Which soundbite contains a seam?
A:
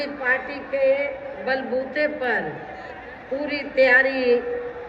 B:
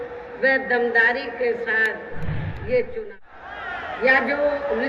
B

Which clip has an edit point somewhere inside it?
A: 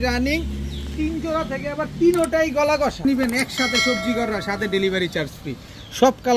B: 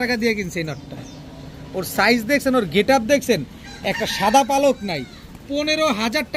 A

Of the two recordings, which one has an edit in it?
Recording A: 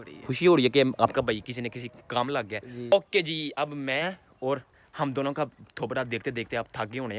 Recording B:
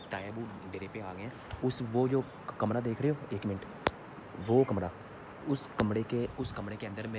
A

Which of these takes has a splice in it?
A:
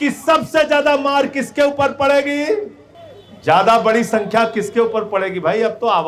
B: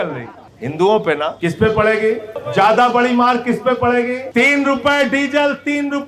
B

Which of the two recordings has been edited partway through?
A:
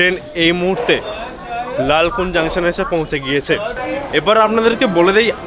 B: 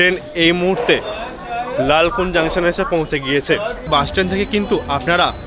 B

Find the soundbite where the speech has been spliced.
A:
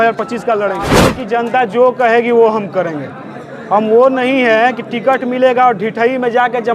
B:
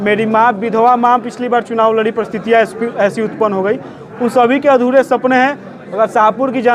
A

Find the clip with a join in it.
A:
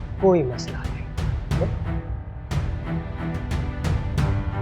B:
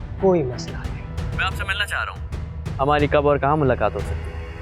B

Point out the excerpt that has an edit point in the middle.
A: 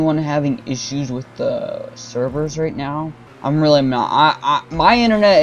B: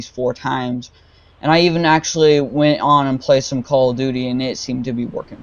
A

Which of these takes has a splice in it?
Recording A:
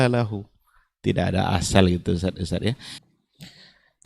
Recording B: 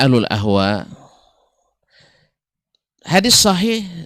A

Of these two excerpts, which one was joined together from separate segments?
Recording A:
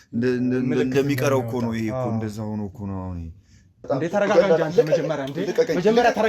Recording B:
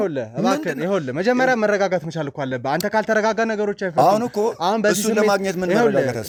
A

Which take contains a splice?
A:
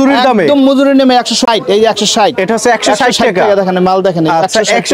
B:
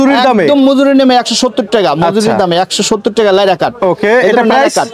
A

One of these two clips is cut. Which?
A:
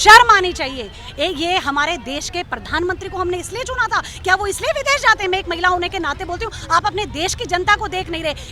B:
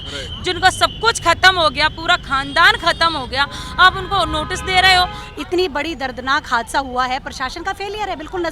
B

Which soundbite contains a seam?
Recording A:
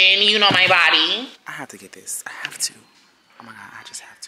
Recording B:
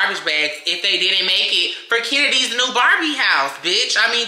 A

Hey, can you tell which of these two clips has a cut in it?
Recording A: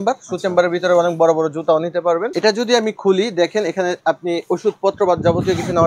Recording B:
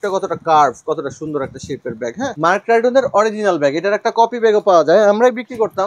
A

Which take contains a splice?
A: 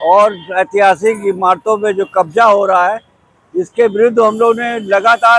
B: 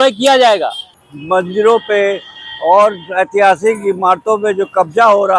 B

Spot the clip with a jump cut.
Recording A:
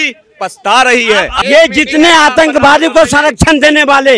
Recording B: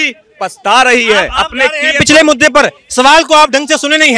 A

